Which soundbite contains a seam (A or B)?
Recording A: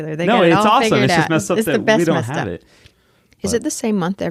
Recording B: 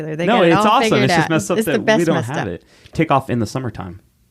B